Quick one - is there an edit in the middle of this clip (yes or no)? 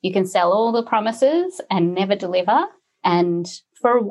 yes